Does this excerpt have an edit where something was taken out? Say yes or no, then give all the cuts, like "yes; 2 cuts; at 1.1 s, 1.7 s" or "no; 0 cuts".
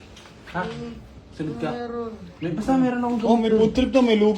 no; 0 cuts